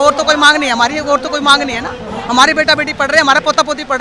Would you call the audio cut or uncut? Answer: uncut